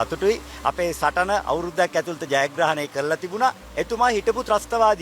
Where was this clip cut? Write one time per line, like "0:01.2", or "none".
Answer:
0:03.7